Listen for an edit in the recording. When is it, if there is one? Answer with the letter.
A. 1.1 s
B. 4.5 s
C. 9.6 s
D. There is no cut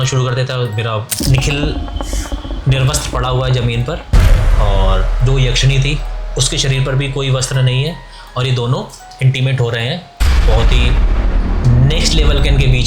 A